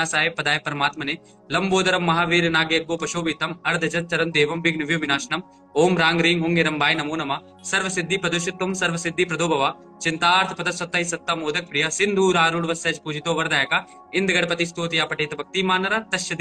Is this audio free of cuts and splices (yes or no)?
yes